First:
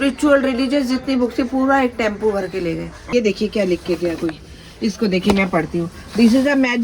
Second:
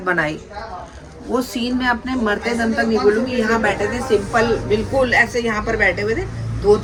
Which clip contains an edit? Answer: first; 1 cut; at 2.9 s

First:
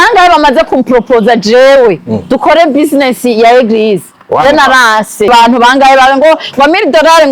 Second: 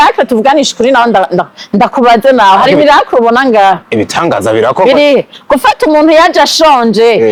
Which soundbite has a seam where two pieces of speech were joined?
first; 1 cut; at 5.3 s

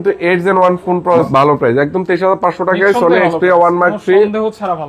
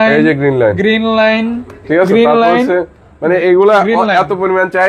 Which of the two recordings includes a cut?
first; 1 cut; at 1.3 s

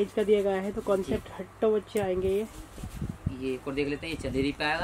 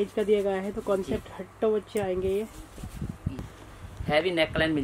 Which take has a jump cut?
second; 1 cut; at 3.4 s

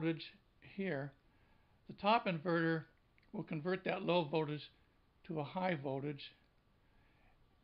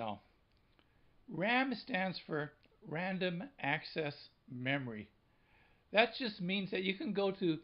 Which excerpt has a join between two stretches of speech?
first; 1 cut; at 4.6 s

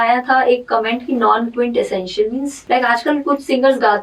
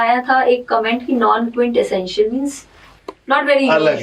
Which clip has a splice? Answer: first; 1 cut; at 2.6 s

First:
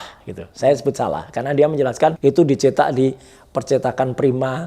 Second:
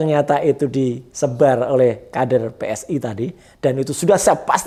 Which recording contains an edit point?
first; 1 cut; at 2.2 s

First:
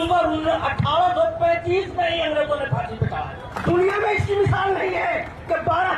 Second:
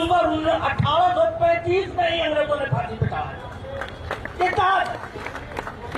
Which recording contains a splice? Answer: first; 1 cut; at 3.5 s

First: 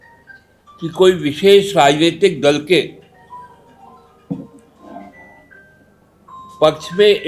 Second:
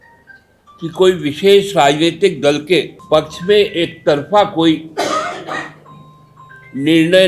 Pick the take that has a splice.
second; 1 cut; at 3.0 s

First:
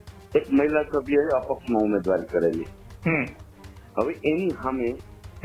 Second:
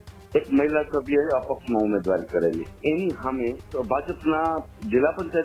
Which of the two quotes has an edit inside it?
second; 2 cuts; at 2.8 s, 3.7 s

